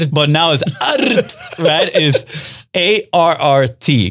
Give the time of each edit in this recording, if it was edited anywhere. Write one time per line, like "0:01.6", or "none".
none